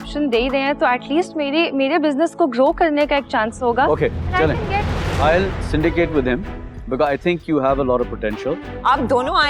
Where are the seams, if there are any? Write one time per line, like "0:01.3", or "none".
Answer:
none